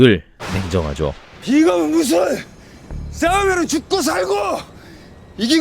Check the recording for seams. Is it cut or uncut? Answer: uncut